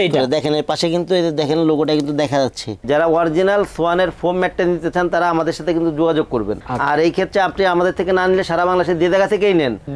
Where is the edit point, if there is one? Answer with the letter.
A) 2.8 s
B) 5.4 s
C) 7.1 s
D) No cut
A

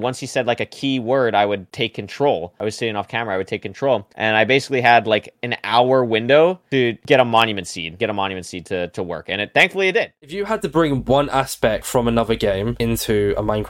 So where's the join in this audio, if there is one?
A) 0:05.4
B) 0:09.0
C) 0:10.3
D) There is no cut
C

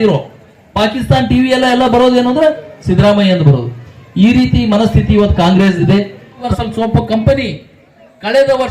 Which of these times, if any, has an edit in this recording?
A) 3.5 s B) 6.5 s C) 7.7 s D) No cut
B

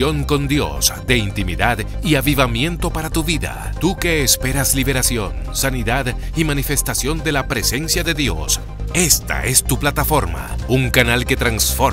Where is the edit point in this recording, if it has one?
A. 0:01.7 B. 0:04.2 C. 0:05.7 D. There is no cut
D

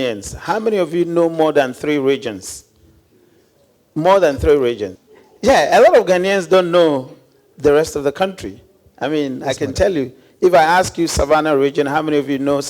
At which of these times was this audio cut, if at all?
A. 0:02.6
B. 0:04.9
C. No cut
B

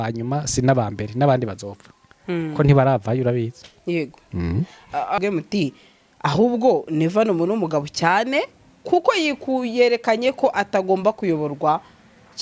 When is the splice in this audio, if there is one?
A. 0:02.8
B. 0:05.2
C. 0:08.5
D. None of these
B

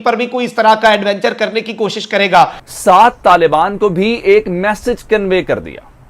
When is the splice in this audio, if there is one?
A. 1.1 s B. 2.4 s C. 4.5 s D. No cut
B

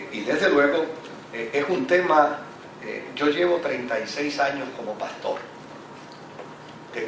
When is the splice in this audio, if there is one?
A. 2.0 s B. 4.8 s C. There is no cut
B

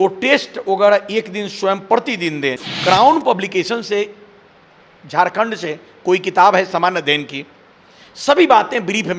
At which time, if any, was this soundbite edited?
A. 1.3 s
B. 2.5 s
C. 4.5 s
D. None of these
B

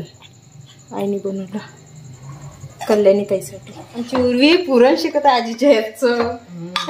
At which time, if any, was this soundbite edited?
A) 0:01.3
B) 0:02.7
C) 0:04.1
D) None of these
C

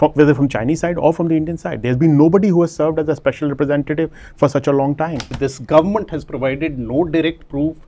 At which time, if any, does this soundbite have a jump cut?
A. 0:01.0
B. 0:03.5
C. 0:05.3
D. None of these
C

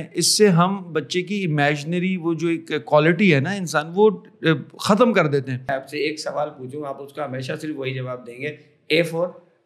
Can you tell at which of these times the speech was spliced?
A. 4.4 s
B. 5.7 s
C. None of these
B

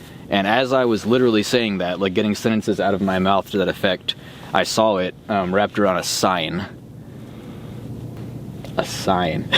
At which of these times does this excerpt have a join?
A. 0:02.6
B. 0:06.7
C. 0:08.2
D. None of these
C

